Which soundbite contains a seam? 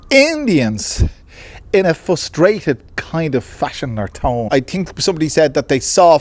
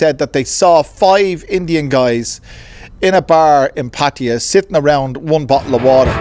first; 1 cut; at 4.4 s

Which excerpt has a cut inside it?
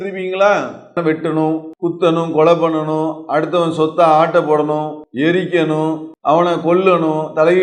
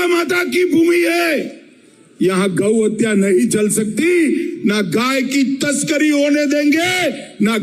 first; 4 cuts; at 1.0 s, 1.7 s, 5.0 s, 6.1 s

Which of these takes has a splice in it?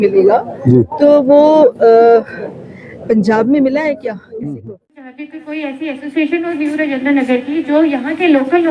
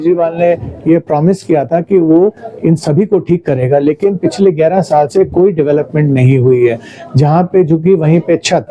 first; 1 cut; at 5.2 s

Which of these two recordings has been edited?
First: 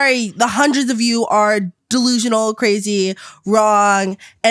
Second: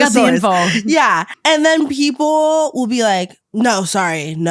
second; 2 cuts; at 1.3 s, 3.4 s

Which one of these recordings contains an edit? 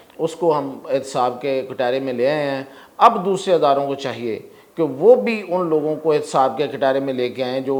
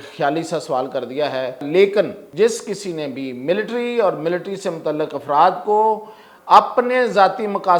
second; 2 cuts; at 1.6 s, 2.2 s

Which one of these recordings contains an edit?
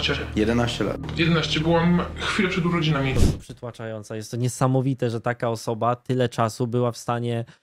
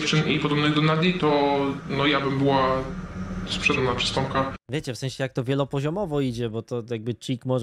first; 1 cut; at 3.2 s

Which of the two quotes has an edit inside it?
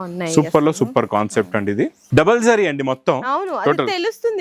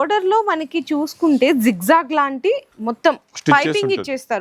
first; 1 cut; at 2.0 s

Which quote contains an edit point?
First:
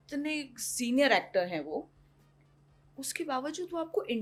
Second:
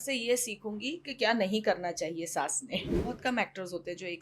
second; 1 cut; at 2.9 s

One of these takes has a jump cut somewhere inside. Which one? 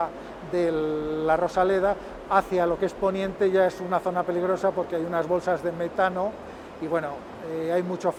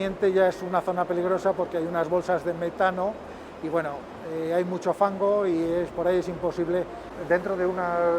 second; 1 cut; at 7.2 s

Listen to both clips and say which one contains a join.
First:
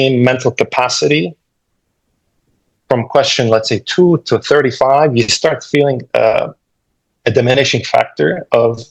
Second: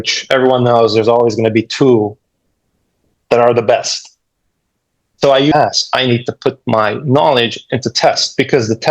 second; 1 cut; at 5.5 s

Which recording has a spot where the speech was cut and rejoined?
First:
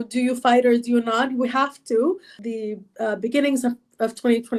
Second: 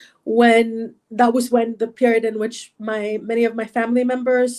first; 1 cut; at 2.4 s

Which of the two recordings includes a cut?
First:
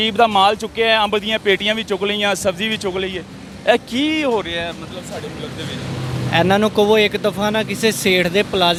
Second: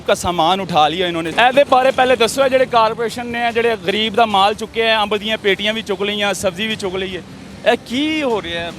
second; 1 cut; at 1.3 s

